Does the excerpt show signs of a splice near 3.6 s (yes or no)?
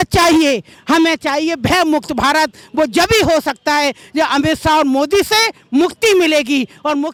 no